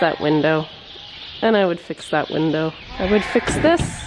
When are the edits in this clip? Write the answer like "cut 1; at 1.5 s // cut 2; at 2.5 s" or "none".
cut 1; at 2.8 s